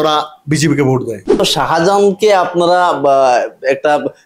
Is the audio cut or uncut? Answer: cut